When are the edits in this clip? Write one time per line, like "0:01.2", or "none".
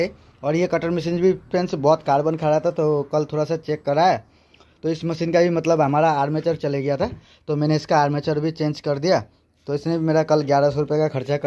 none